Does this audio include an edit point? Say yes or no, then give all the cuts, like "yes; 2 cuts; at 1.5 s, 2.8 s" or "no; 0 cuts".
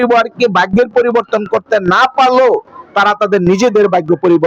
no; 0 cuts